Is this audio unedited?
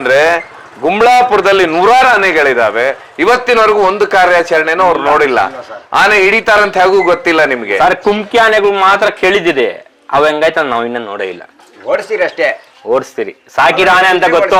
yes; 0 cuts

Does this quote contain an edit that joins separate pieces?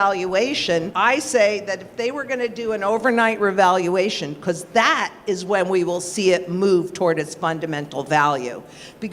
yes; 1 cut; at 0.9 s

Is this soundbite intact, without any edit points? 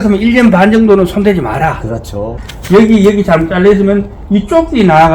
no; 1 cut; at 2.4 s

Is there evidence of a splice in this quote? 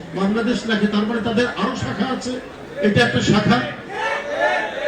yes; 1 cut; at 2.6 s

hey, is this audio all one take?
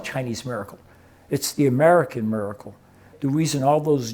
no; 1 cut; at 3.1 s

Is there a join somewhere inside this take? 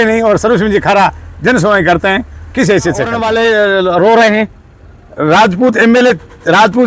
yes; 1 cut; at 3.2 s

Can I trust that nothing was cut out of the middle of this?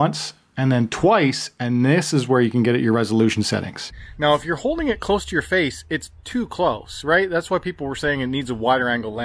no; 1 cut; at 3.8 s

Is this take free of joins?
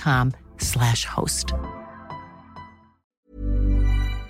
no; 1 cut; at 3.3 s

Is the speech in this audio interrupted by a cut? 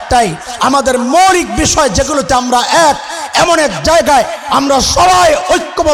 no; 0 cuts

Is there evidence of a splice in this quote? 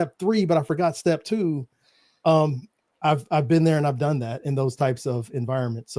no; 0 cuts

